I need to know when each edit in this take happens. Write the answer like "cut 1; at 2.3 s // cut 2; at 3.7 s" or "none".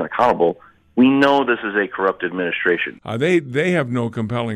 cut 1; at 2.9 s